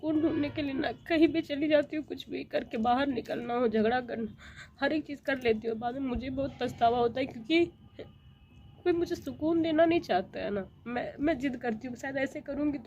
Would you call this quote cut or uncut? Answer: uncut